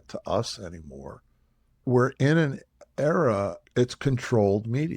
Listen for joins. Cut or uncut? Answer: cut